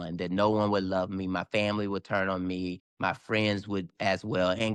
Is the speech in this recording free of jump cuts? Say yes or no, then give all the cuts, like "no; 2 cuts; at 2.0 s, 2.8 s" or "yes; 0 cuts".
yes; 0 cuts